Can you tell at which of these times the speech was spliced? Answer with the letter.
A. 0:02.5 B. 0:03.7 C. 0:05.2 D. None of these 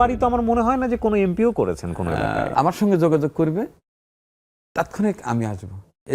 A